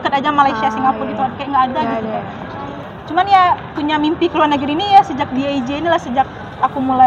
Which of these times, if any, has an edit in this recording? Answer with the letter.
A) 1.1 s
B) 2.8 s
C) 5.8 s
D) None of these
B